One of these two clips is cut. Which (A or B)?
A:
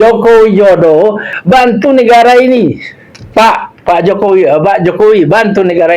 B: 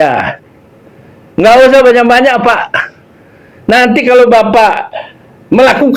A